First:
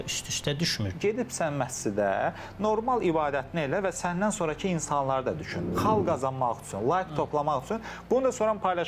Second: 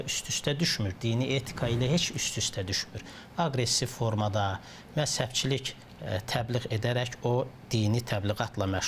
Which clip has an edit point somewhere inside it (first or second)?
first